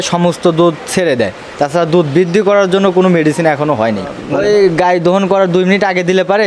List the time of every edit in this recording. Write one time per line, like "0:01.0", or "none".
0:04.2